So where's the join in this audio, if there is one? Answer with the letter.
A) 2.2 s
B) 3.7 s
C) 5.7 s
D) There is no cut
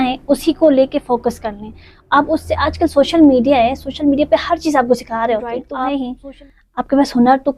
C